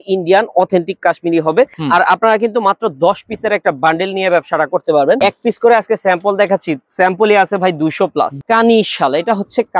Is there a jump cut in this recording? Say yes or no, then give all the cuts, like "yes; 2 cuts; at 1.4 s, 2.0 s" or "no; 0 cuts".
yes; 3 cuts; at 1.8 s, 5.2 s, 8.3 s